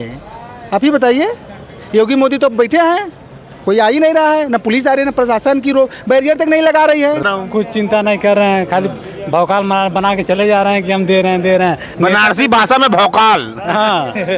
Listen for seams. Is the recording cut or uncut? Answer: cut